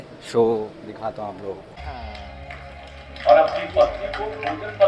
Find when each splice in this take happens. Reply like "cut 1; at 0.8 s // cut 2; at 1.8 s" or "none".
cut 1; at 1.8 s